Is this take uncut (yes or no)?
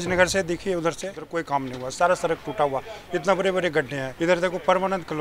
no